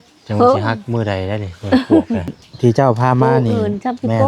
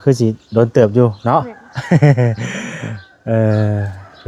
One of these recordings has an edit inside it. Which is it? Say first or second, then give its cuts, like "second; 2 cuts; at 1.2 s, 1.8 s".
first; 1 cut; at 2.4 s